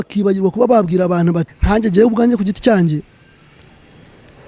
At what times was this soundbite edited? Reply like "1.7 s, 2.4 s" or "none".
1.5 s